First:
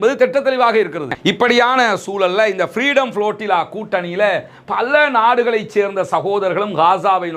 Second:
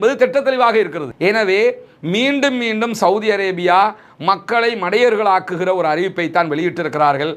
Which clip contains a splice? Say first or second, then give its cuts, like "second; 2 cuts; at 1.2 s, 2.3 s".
first; 1 cut; at 1.2 s